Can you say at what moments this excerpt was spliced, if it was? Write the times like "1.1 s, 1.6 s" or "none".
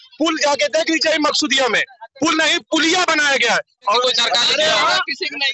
4.0 s

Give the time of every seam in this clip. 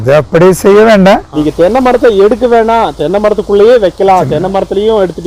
1.3 s

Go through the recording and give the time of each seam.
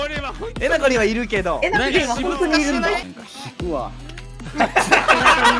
3.0 s

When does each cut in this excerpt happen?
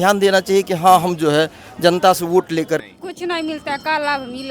2.8 s

